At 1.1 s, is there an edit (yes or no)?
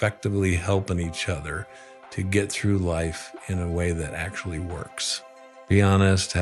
no